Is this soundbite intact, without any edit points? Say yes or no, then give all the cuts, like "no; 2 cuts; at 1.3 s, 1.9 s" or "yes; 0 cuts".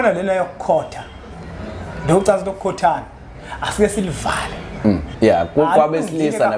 no; 1 cut; at 5.1 s